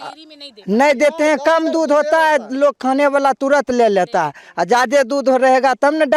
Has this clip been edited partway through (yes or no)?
no